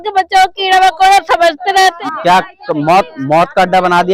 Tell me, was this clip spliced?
yes; 1 cut; at 2.0 s

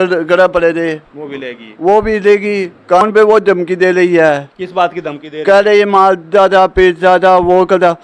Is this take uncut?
no; 1 cut; at 3.0 s

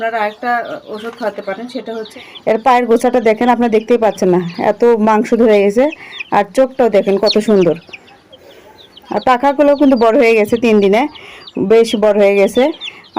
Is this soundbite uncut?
no; 1 cut; at 2.2 s

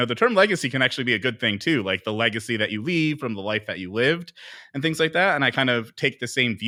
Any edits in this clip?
no; 0 cuts

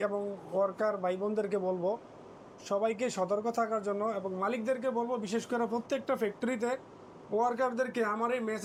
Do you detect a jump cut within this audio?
no; 0 cuts

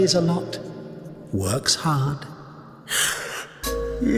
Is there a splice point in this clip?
yes; 2 cuts; at 1.2 s, 2.7 s

